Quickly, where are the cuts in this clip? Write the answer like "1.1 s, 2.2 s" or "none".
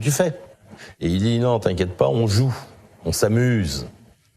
none